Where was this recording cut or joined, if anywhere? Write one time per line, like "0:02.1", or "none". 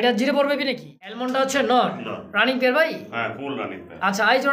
0:01.0